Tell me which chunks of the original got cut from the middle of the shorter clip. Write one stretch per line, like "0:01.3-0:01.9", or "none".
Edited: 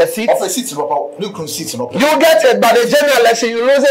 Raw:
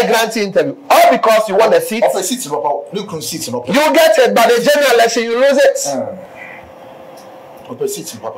none

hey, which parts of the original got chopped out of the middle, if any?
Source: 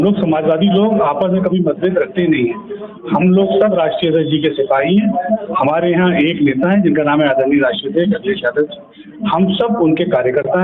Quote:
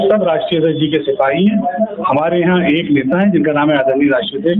none

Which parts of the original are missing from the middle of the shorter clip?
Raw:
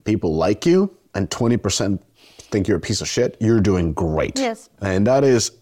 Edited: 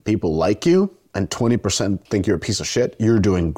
0:02.0-0:02.4

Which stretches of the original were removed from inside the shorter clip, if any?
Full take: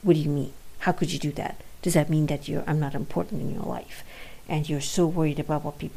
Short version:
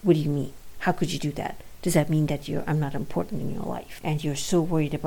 0:03.9-0:04.3

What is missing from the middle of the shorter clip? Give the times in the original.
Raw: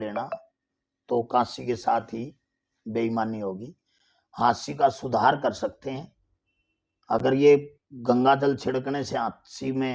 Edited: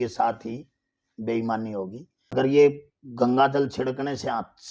0:04.0-0:07.2

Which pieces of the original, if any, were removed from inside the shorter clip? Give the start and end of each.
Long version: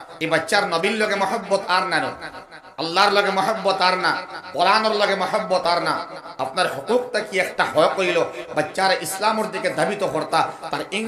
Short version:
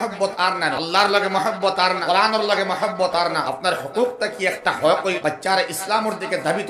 0:02.1-0:02.8
0:04.0-0:04.5
0:05.9-0:06.4
0:08.1-0:08.5

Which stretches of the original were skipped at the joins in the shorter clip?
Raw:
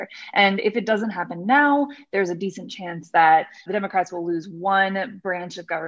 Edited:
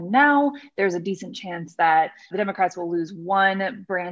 none

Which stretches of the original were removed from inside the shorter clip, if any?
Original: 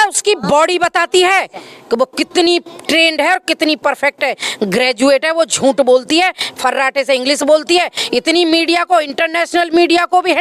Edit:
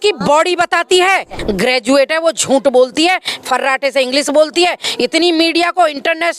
0:01.6-0:04.5

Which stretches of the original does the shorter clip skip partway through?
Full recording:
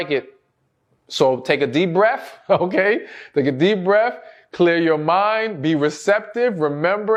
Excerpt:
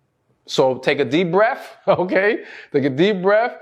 none

